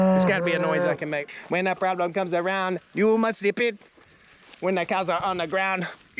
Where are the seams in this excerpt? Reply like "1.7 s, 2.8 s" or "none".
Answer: 1.3 s

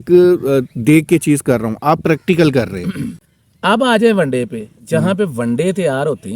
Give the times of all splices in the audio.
3.2 s

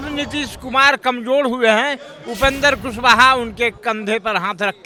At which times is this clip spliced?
none

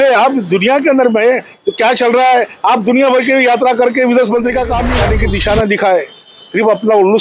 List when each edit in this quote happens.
5.0 s

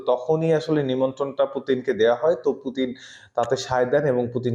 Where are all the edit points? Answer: none

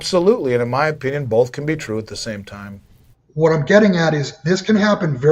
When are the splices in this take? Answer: 3.1 s

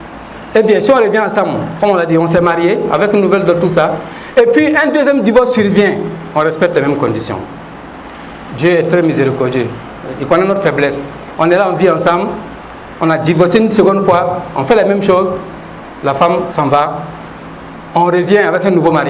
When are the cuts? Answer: none

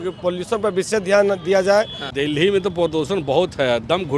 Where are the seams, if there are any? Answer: 2.1 s

